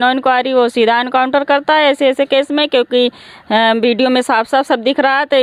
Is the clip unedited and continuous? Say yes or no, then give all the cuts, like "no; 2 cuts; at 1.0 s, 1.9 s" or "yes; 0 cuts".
yes; 0 cuts